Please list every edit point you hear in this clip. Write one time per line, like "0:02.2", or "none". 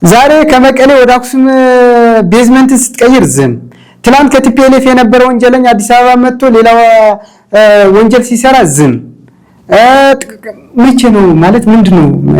none